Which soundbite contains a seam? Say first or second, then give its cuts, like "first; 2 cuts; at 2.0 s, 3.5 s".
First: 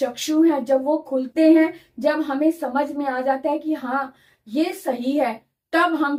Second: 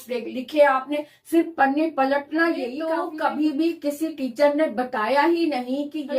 second; 1 cut; at 2.9 s